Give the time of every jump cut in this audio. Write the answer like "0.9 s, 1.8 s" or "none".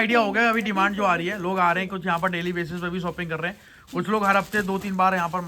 none